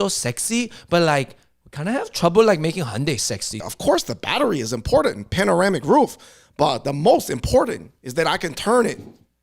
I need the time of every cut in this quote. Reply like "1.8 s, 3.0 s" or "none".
3.7 s